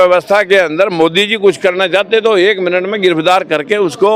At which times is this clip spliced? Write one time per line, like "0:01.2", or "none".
none